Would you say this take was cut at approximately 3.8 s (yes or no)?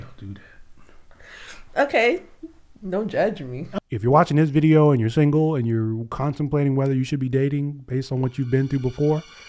yes